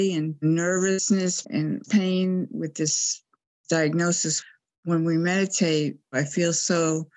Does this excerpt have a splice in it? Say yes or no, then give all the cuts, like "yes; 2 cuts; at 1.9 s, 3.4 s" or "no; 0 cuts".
yes; 1 cut; at 4.5 s